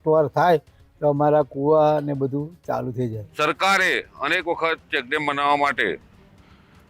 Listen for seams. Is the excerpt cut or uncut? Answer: cut